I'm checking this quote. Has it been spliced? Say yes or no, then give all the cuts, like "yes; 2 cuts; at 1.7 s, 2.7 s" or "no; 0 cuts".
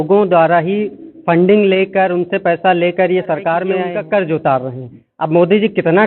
yes; 1 cut; at 3.8 s